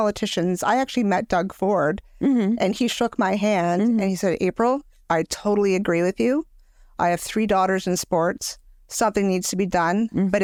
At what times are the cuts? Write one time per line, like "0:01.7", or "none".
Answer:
none